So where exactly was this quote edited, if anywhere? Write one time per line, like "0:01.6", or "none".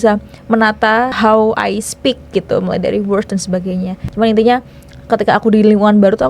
0:01.1
0:04.0